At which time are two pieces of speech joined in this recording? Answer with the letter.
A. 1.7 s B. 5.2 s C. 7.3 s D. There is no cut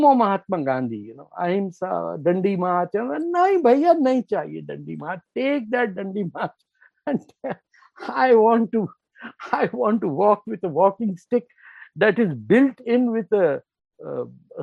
D